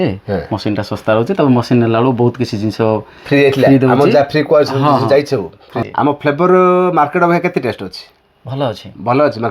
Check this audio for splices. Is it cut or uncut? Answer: cut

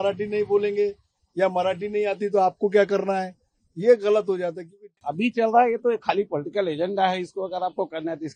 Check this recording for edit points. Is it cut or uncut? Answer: cut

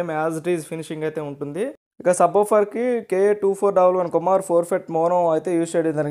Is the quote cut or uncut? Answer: cut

